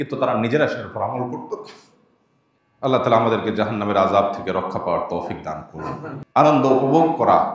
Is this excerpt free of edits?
no; 1 cut; at 6.1 s

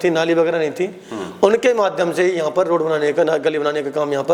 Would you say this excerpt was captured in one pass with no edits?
yes; 0 cuts

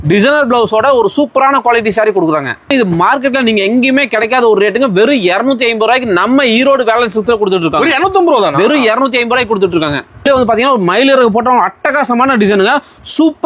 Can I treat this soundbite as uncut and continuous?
no; 2 cuts; at 2.7 s, 10.3 s

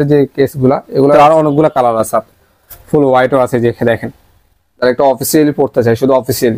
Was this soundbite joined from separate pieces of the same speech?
yes; 2 cuts; at 1.1 s, 4.8 s

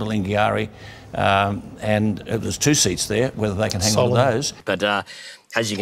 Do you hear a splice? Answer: no; 0 cuts

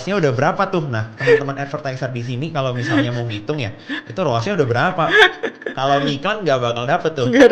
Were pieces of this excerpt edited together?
no; 0 cuts

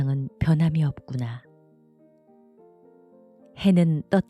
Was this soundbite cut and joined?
yes; 2 cuts; at 1.5 s, 3.6 s

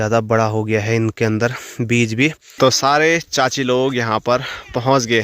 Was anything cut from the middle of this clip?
yes; 1 cut; at 2.4 s

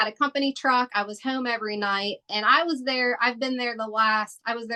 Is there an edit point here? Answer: no; 0 cuts

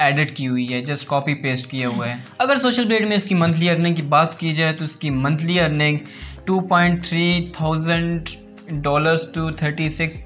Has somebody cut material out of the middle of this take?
no; 0 cuts

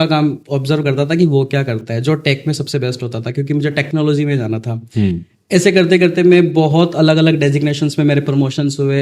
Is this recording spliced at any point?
no; 0 cuts

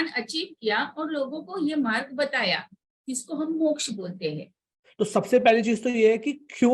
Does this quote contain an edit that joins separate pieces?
yes; 1 cut; at 4.8 s

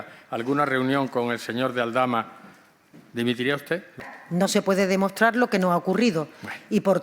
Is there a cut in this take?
yes; 1 cut; at 4.1 s

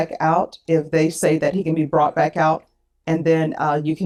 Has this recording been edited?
no; 0 cuts

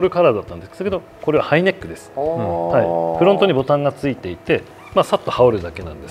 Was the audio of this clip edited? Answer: no; 0 cuts

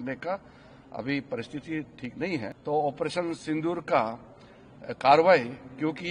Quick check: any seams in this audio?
yes; 1 cut; at 2.5 s

